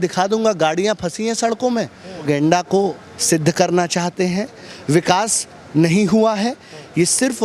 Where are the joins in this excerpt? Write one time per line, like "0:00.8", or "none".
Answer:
0:02.2